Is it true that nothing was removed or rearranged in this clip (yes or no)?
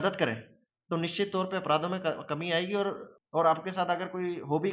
no